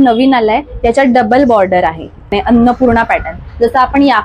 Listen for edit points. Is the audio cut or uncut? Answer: cut